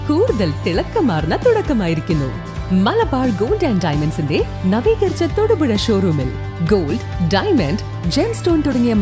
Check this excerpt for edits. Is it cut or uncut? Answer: uncut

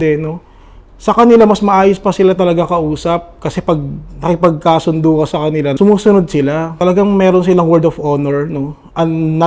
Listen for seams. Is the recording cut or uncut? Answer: cut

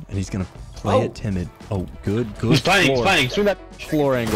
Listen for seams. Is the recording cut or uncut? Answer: uncut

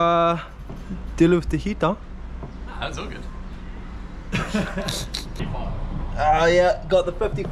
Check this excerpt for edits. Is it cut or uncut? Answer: uncut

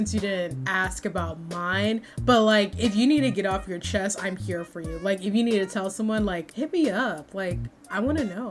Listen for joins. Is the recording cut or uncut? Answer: uncut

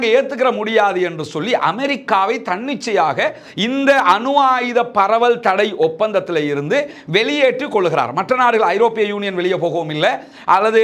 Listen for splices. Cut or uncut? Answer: uncut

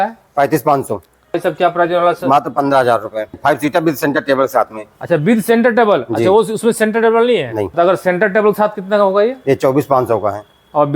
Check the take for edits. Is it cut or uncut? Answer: cut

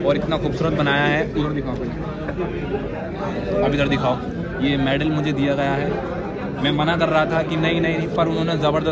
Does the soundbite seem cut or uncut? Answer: uncut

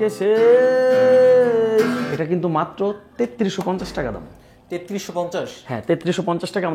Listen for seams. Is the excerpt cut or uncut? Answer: cut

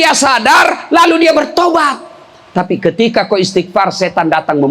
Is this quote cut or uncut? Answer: cut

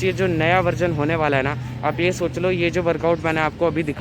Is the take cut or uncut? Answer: uncut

